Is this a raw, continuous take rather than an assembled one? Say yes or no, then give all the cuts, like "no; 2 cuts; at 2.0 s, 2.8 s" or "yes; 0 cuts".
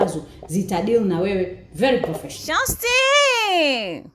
no; 1 cut; at 2.7 s